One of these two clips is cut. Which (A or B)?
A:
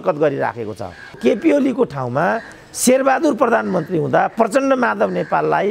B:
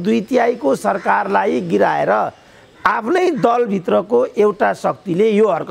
A